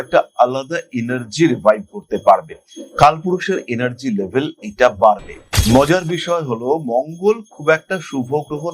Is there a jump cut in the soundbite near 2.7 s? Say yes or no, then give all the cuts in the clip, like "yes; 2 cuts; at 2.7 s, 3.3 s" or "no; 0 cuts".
no; 1 cut; at 5.5 s